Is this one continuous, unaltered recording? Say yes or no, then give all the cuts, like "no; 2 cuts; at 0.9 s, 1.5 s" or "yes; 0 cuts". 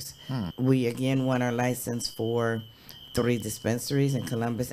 yes; 0 cuts